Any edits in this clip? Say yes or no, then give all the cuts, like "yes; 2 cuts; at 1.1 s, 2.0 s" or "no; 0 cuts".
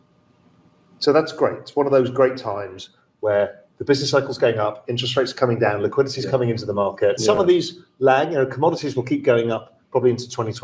yes; 1 cut; at 7.2 s